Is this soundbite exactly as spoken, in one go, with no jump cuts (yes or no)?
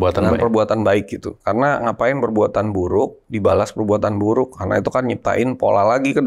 yes